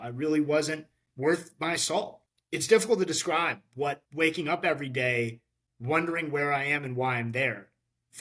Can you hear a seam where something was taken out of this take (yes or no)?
yes